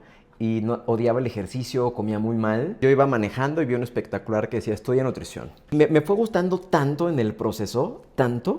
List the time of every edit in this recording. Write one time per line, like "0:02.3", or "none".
0:02.7
0:05.7